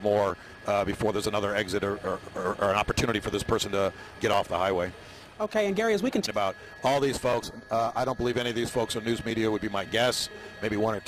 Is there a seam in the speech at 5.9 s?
no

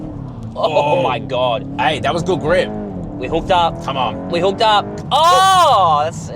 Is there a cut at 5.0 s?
yes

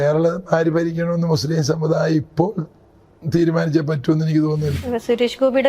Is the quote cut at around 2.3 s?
no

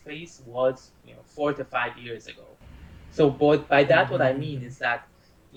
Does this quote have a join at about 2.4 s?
no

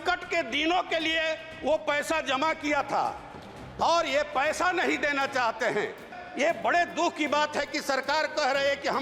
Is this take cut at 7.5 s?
no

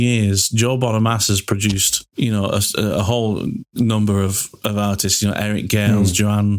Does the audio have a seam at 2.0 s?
yes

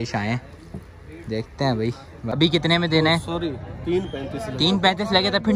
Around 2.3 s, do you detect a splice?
yes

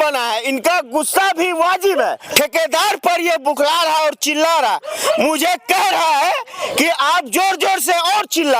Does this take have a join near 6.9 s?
no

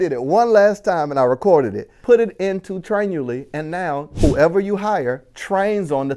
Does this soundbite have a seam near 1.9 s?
yes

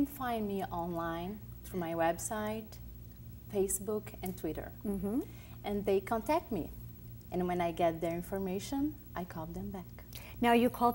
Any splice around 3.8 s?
yes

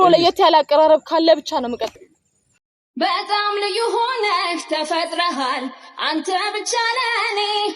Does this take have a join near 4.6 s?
no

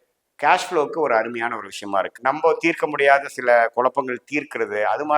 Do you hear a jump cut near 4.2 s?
no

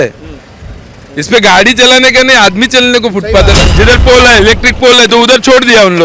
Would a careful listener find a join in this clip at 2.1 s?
no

